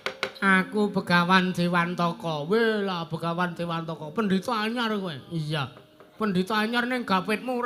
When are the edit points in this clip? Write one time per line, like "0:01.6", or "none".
none